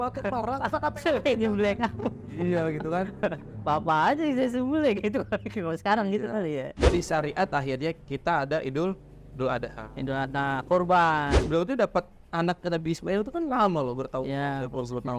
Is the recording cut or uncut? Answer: cut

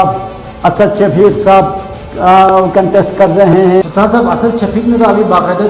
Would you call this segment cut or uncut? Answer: cut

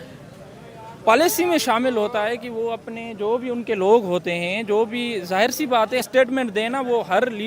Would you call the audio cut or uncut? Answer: cut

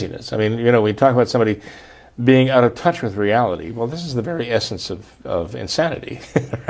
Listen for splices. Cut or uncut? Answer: uncut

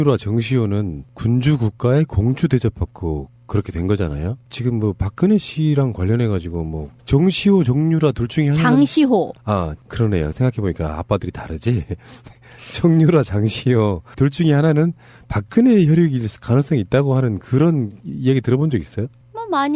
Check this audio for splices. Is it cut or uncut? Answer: uncut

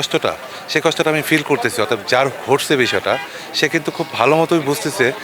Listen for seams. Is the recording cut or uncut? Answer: uncut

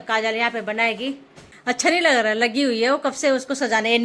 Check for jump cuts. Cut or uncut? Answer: cut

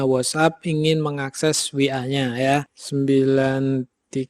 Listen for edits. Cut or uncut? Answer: cut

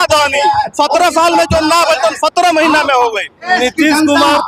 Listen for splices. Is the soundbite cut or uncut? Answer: cut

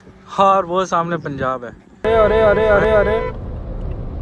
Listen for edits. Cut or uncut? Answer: cut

